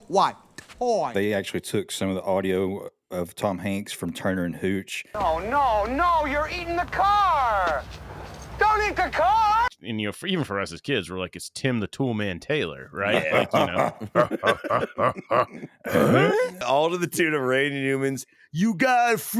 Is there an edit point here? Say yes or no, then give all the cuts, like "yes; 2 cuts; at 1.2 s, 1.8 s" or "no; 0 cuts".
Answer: yes; 4 cuts; at 1.1 s, 5.1 s, 9.7 s, 16.6 s